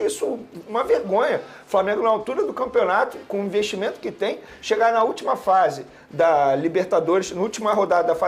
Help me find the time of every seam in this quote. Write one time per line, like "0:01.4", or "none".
none